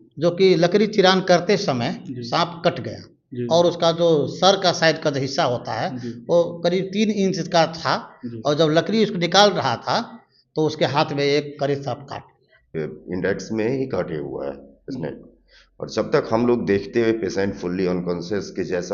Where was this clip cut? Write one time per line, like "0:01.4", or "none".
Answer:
0:12.7